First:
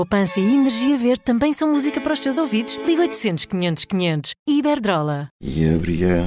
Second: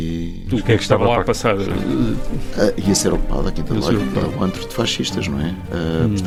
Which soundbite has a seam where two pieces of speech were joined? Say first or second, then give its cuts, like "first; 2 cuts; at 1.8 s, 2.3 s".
first; 1 cut; at 5.4 s